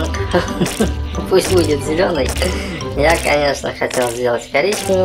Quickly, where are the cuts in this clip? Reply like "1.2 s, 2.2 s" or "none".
none